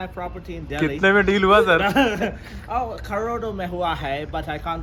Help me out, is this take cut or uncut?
uncut